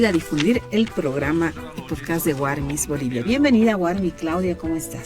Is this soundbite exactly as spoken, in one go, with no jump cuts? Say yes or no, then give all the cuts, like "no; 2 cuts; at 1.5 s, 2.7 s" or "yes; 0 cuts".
no; 1 cut; at 4.0 s